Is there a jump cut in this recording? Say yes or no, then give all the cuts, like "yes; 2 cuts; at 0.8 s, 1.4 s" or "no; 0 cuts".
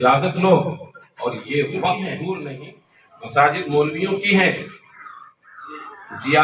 yes; 1 cut; at 2.5 s